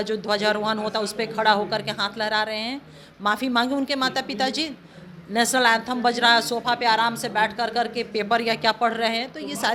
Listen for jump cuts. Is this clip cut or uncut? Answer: uncut